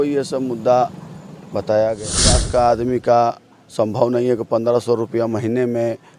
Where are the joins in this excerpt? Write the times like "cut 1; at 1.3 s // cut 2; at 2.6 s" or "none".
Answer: cut 1; at 2.3 s